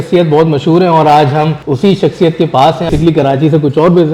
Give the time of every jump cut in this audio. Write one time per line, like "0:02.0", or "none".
0:01.6
0:02.9